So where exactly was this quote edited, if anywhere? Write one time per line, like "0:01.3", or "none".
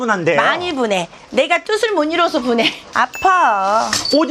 0:02.8